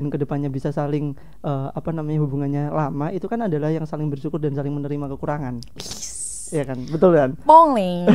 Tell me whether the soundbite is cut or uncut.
uncut